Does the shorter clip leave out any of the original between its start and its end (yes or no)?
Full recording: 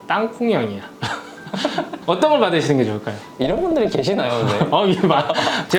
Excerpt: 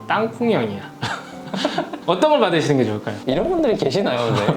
yes